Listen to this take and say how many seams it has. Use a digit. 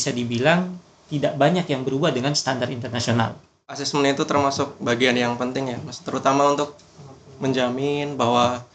1